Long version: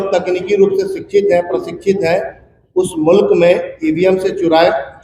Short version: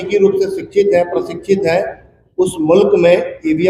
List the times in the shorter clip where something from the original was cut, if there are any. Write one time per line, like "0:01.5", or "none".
none